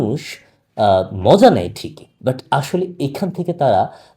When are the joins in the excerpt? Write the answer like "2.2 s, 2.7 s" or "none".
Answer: 2.1 s